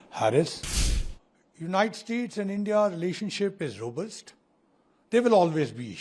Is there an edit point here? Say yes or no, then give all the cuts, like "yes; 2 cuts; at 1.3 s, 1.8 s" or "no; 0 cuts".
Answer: yes; 1 cut; at 1.0 s